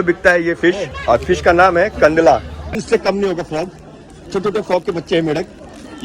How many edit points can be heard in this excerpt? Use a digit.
1